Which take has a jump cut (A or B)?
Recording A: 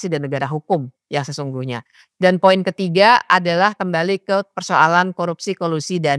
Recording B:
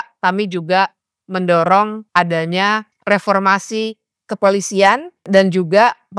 B